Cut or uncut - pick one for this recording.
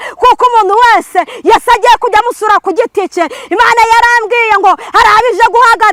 uncut